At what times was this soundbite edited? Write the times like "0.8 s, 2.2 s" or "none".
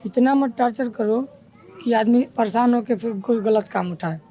none